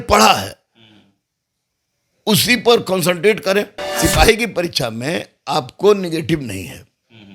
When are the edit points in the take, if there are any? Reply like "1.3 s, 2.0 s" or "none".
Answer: 3.8 s